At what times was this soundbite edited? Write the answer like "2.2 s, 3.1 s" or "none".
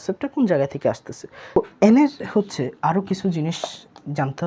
1.6 s